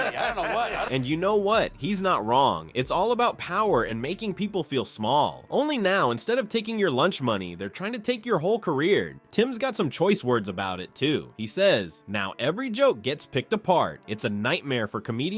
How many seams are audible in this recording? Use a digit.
0